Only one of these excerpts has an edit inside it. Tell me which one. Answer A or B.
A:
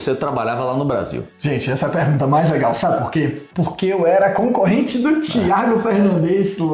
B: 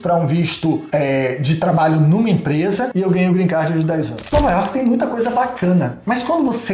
B